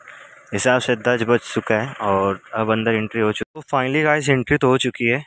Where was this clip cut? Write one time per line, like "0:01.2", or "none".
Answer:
0:03.5